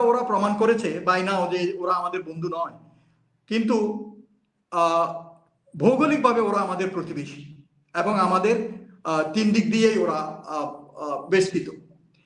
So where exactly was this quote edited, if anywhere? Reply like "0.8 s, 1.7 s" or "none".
none